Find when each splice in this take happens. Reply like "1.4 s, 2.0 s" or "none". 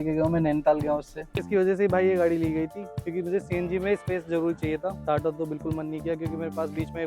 1.4 s, 4.9 s